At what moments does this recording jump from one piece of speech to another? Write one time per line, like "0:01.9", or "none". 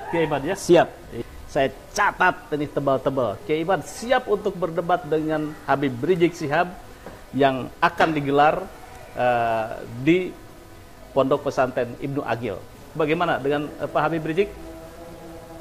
0:01.1
0:12.7

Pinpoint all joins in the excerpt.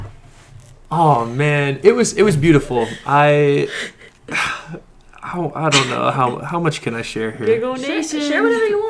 0:05.3

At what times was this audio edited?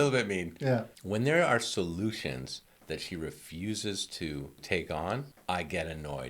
0:01.0
0:04.6
0:05.3

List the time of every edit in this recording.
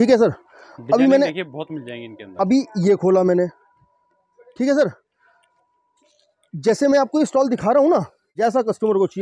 0:08.2

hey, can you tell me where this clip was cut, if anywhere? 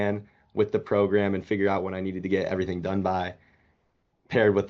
none

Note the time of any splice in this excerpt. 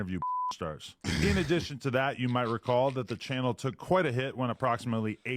0:02.2

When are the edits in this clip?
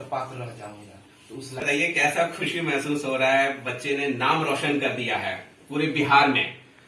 0:01.6

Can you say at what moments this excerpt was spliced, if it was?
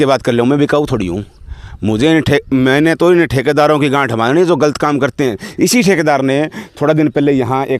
0:05.4

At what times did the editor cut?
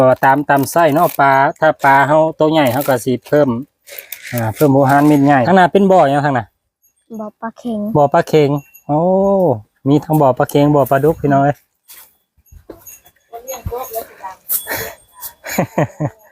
0:05.4

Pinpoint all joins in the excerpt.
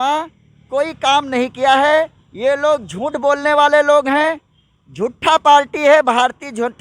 none

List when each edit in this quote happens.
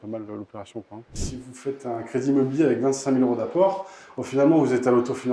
0:01.2

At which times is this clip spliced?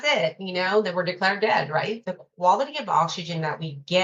0:02.0

